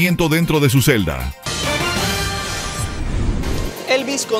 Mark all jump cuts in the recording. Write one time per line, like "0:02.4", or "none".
0:01.2
0:03.4